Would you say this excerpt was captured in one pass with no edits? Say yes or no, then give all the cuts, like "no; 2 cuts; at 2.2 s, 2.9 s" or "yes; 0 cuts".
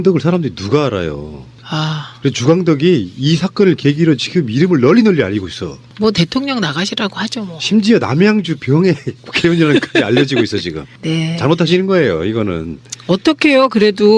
yes; 0 cuts